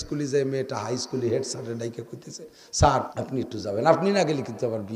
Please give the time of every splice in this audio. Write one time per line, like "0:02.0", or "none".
0:03.2